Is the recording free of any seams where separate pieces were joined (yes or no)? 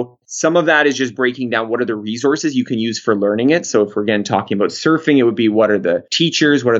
yes